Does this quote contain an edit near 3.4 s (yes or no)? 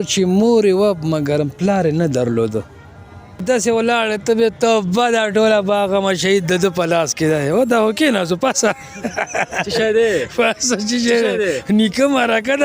yes